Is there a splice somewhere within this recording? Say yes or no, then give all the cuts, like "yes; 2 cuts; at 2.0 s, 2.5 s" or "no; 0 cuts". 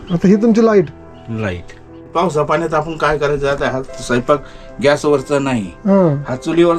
yes; 1 cut; at 2.1 s